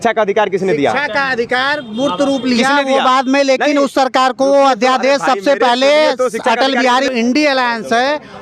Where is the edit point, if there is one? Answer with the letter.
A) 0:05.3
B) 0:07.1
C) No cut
B